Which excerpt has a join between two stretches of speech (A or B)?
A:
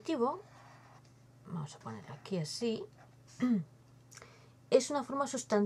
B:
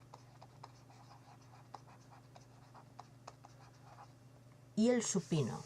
B